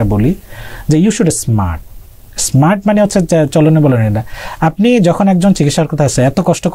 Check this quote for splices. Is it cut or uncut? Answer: uncut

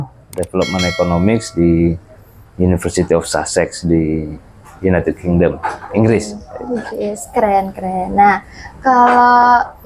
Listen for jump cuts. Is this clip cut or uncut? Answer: uncut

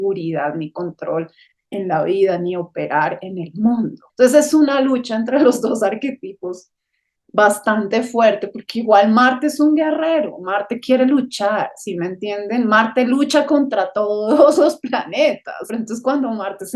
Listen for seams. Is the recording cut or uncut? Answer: cut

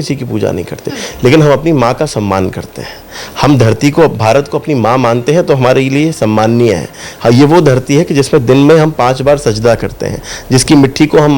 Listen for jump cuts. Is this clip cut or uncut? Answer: uncut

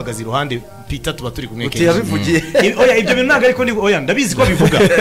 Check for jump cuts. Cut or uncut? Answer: uncut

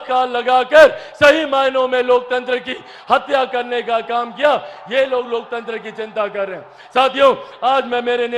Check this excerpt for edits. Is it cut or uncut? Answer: uncut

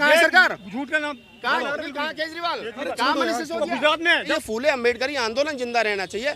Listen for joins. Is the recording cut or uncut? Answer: cut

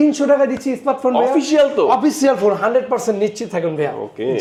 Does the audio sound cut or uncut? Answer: uncut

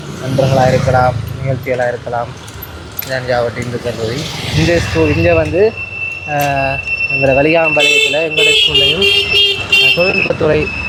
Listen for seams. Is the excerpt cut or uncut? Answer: uncut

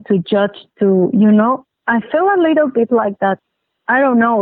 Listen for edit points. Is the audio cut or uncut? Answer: cut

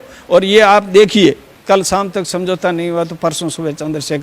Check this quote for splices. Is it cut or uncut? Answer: cut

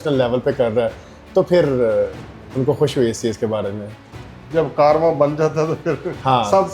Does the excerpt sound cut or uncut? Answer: uncut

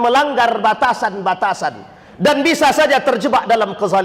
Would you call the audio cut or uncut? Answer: uncut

